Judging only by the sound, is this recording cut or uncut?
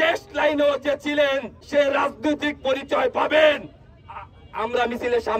cut